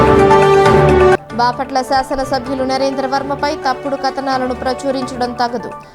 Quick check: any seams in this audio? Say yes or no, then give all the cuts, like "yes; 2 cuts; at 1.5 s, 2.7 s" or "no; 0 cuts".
yes; 1 cut; at 1.1 s